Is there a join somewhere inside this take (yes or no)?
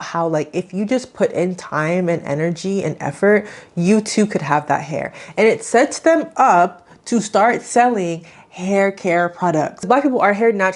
yes